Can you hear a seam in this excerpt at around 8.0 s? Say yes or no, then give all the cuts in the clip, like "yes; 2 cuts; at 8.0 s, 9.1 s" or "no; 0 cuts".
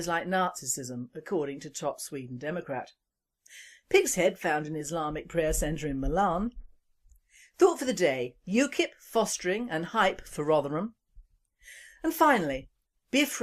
no; 1 cut; at 12.1 s